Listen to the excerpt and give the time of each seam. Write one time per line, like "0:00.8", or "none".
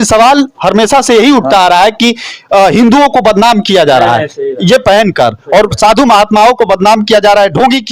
none